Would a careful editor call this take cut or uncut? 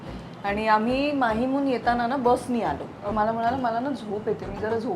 cut